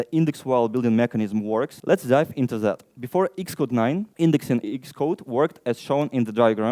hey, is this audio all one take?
no; 4 cuts; at 1.8 s, 2.9 s, 4.1 s, 4.6 s

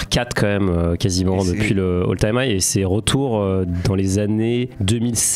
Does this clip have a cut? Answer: no; 0 cuts

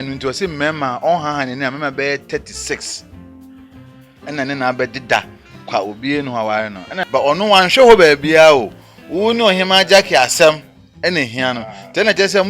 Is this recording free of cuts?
no; 1 cut; at 6.9 s

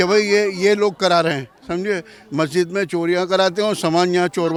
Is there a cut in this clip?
no; 0 cuts

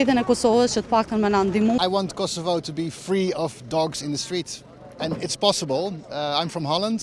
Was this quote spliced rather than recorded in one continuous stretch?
yes; 1 cut; at 1.8 s

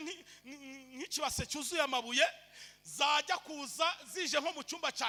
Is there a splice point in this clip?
no; 0 cuts

